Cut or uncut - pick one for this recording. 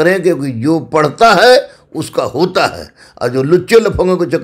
uncut